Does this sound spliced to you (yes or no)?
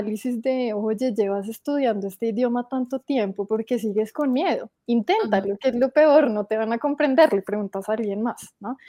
no